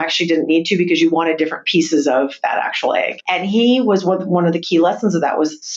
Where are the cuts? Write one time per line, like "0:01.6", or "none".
0:03.2